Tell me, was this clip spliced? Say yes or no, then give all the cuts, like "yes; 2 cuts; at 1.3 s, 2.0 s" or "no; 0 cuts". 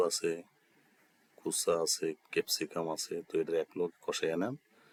no; 0 cuts